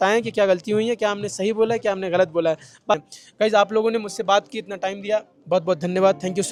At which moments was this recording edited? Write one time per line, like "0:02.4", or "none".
none

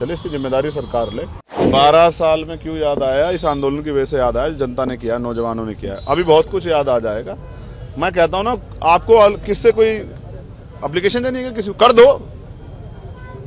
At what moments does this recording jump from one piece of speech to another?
0:01.7

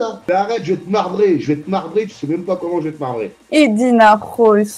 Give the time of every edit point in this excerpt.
0:03.4

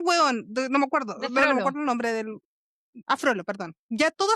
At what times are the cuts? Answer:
0:03.0

